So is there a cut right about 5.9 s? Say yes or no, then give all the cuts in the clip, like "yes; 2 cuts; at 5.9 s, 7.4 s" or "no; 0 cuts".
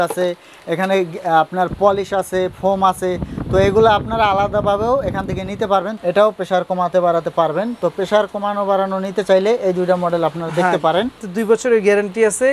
yes; 2 cuts; at 5.9 s, 11.2 s